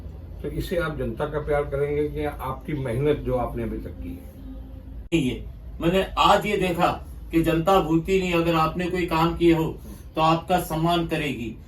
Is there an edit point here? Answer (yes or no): yes